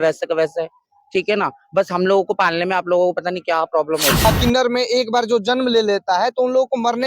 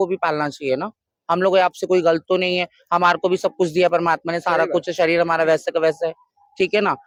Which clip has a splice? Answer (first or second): first